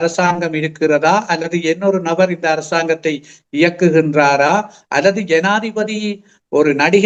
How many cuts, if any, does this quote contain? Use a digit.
0